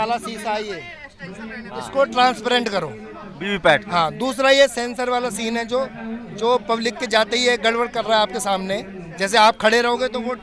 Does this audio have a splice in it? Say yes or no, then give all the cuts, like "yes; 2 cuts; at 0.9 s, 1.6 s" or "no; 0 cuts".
no; 0 cuts